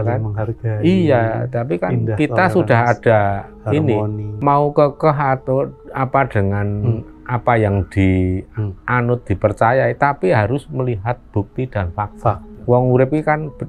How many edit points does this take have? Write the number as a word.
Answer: zero